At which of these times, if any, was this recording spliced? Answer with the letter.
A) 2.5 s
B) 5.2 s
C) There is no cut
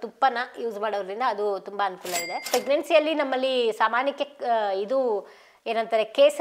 A